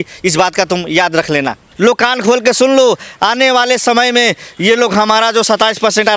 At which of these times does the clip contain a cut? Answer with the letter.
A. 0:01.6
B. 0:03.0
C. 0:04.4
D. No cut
A